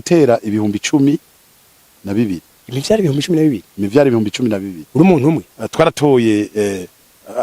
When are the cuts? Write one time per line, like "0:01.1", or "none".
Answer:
0:05.6